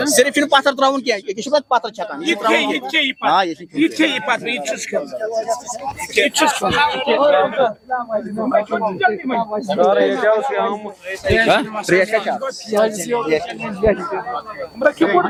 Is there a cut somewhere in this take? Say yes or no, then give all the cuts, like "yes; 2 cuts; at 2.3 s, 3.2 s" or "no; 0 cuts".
no; 0 cuts